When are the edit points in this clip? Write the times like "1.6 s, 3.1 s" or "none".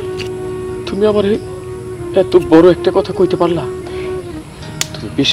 none